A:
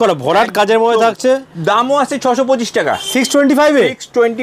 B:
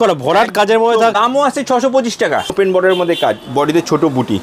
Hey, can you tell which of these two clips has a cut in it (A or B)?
B